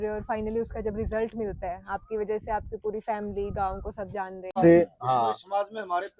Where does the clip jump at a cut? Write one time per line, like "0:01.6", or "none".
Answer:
0:04.5